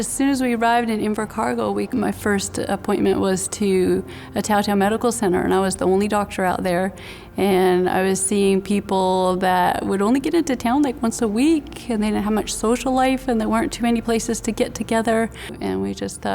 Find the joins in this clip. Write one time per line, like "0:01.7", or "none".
0:01.9